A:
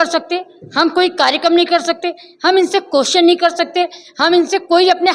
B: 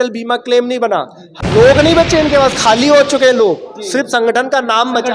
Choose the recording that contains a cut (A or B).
B